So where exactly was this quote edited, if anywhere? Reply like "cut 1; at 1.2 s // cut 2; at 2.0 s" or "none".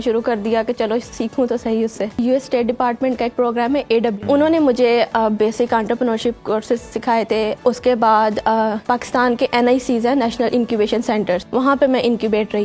cut 1; at 2.2 s // cut 2; at 4.2 s // cut 3; at 7.6 s // cut 4; at 8.8 s // cut 5; at 11.4 s